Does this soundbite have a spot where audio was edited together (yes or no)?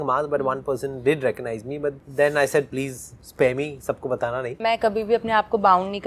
yes